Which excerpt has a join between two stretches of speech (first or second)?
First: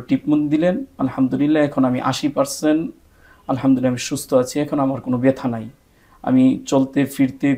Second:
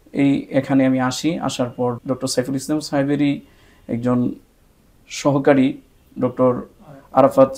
second